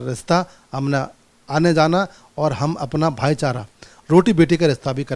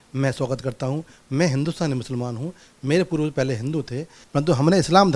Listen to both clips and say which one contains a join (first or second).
second